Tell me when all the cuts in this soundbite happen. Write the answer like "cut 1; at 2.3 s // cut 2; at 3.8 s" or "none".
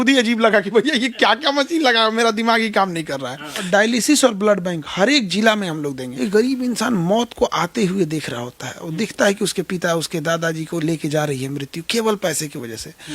cut 1; at 3.6 s // cut 2; at 6.1 s

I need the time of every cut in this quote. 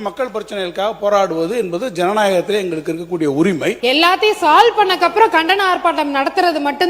cut 1; at 3.8 s

